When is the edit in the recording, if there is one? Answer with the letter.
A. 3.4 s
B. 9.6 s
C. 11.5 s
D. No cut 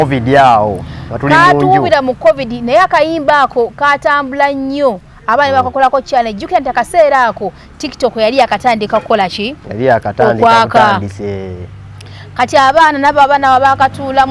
D